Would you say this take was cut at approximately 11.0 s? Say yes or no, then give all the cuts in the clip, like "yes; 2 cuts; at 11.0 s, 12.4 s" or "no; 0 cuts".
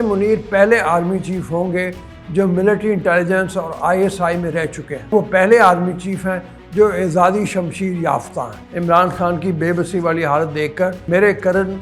yes; 3 cuts; at 5.1 s, 8.6 s, 11.0 s